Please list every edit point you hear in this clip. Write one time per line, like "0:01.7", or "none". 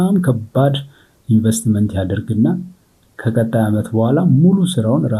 none